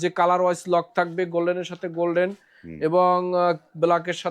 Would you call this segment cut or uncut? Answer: uncut